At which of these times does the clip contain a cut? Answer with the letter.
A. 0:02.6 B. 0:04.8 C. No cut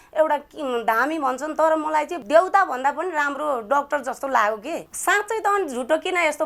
B